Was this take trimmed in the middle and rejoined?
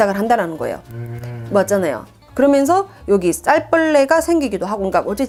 no; 0 cuts

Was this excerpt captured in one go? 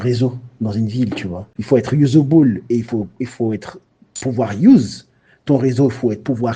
no; 1 cut; at 1.5 s

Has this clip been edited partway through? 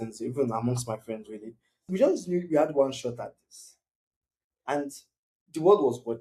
yes; 1 cut; at 1.9 s

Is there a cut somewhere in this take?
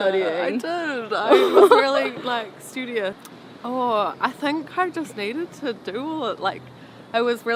yes; 1 cut; at 3.3 s

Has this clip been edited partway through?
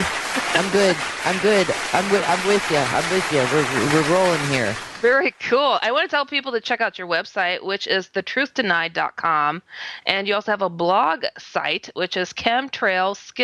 no; 0 cuts

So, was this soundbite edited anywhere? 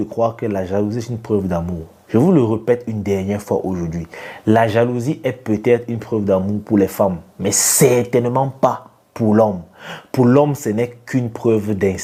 no; 0 cuts

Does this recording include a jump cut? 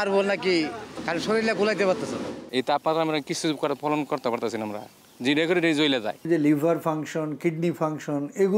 yes; 3 cuts; at 0.9 s, 2.4 s, 6.2 s

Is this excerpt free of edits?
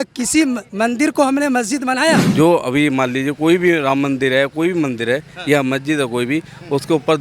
no; 1 cut; at 2.3 s

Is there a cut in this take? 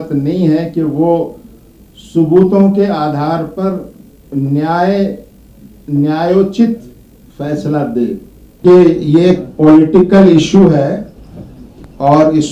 yes; 1 cut; at 8.6 s

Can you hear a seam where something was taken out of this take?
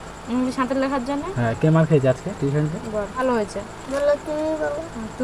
yes; 1 cut; at 3.2 s

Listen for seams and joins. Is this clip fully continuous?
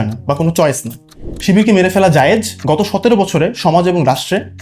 no; 2 cuts; at 1.2 s, 2.5 s

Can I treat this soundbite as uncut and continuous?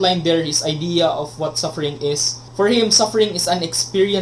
no; 1 cut; at 2.4 s

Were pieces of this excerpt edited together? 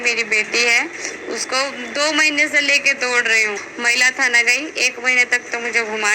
yes; 1 cut; at 3.7 s

